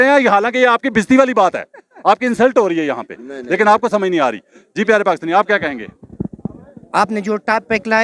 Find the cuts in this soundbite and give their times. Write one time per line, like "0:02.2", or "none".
none